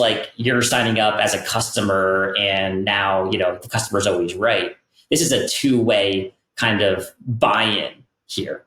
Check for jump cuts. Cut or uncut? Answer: uncut